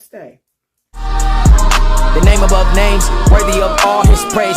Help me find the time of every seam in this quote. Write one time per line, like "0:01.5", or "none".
0:01.2